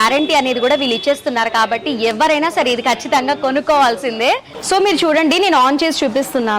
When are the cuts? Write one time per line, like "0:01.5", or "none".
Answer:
0:04.5